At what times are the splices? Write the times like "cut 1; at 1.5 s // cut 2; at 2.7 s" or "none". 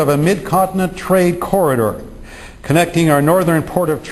cut 1; at 2.1 s